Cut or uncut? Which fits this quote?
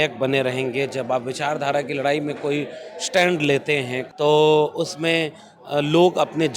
cut